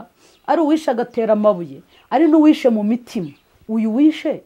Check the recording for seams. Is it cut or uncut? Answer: uncut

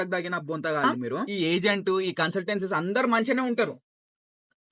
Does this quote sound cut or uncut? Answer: cut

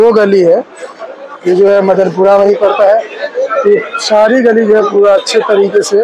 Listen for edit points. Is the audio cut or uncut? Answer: uncut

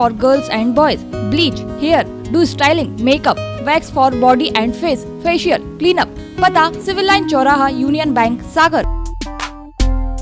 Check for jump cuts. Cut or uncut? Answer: cut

